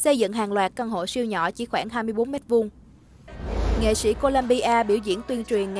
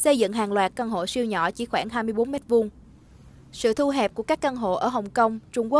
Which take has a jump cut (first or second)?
first